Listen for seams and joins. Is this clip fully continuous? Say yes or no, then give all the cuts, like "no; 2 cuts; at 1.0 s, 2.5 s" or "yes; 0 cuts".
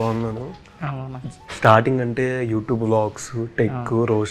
yes; 0 cuts